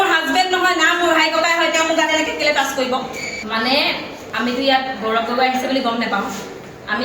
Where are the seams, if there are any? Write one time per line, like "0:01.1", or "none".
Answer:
0:03.3